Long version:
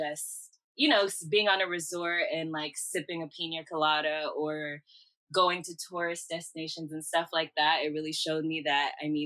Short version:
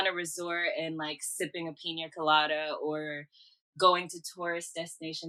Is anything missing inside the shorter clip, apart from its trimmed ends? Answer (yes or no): no